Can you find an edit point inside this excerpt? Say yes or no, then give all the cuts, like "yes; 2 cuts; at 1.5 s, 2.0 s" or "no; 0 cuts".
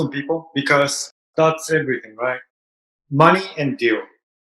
yes; 2 cuts; at 1.2 s, 2.5 s